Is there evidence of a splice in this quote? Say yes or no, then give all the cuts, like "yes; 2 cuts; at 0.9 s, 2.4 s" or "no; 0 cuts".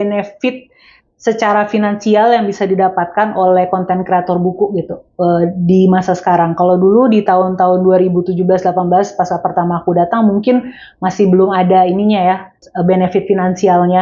no; 0 cuts